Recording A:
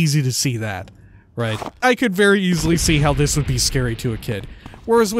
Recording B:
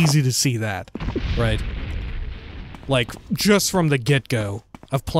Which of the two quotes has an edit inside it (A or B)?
A